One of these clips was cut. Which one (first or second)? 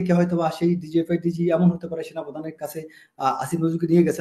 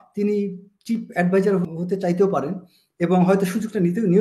second